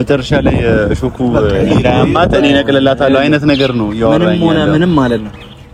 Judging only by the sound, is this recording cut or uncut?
uncut